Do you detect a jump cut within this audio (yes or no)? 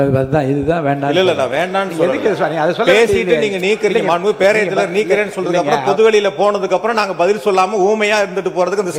no